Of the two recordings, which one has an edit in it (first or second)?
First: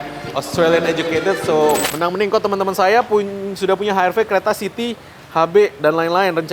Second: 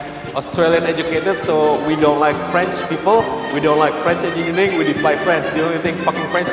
first